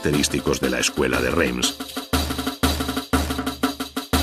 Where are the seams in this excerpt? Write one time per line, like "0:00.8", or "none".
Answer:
0:02.6